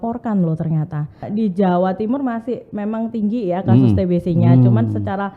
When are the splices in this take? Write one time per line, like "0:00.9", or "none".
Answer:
0:01.2